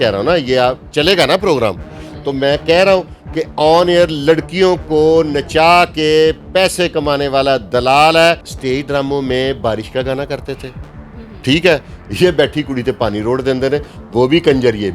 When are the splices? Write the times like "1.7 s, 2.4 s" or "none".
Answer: 8.5 s